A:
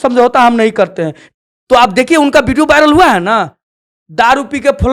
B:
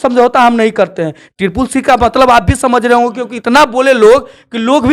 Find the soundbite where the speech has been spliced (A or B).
A